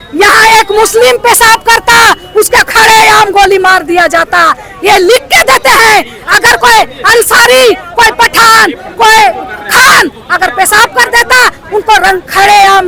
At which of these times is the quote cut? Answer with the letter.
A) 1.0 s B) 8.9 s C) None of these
C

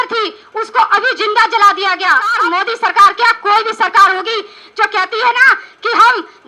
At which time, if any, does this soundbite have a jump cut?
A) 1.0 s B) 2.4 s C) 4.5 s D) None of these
B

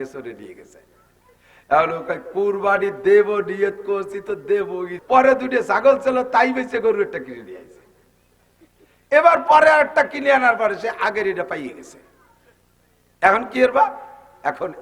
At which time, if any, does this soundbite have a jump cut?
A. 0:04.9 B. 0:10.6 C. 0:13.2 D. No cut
A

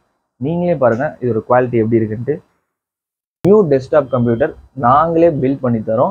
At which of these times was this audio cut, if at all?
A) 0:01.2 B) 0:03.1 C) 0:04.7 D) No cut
B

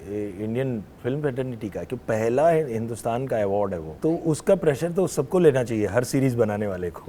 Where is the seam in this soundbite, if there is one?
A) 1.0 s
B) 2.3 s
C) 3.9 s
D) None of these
C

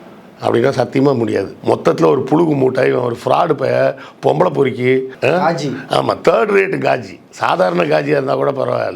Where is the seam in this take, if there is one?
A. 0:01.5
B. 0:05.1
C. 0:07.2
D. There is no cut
A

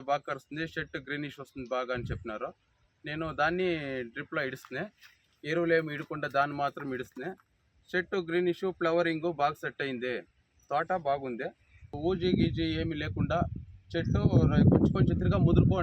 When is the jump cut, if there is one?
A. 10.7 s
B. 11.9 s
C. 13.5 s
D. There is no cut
B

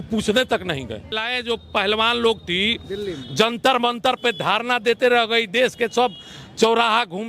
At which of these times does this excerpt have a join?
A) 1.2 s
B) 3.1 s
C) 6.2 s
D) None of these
A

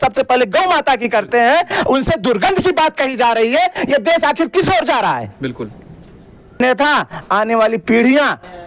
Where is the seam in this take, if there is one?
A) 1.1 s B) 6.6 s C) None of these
B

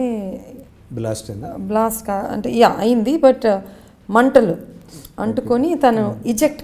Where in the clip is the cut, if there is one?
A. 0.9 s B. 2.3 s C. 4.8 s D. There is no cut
D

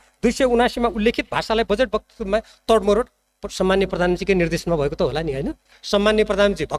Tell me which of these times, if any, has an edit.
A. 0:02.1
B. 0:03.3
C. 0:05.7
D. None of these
C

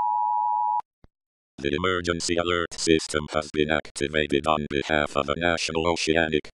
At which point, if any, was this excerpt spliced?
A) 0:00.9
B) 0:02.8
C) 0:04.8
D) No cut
A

